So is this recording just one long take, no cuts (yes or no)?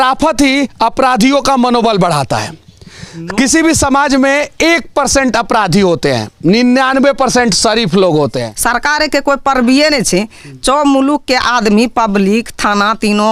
no